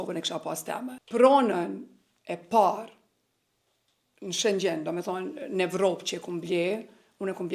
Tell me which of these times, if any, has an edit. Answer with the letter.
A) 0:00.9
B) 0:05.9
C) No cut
A